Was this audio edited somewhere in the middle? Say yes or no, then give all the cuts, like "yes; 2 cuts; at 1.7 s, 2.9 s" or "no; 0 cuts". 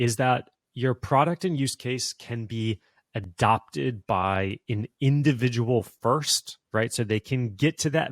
no; 0 cuts